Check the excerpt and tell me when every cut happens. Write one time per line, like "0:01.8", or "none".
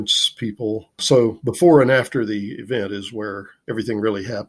0:03.5